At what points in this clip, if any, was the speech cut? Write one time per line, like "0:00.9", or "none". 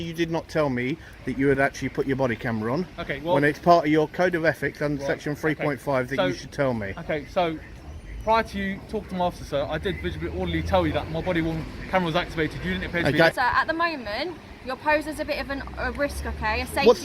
0:13.3